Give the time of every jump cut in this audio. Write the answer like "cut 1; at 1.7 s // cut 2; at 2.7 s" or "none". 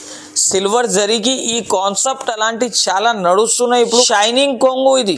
cut 1; at 4.1 s